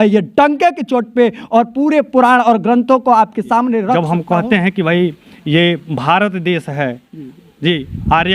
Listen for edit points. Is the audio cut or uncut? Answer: cut